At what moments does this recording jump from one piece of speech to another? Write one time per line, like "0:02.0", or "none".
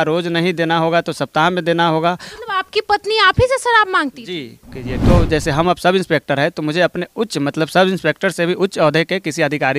0:05.0